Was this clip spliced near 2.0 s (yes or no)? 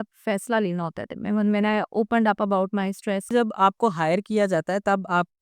no